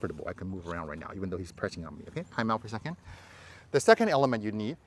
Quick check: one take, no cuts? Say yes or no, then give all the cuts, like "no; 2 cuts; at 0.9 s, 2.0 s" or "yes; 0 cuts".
yes; 0 cuts